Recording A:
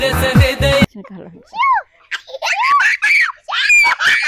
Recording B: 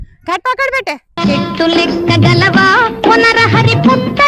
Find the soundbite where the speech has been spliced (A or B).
A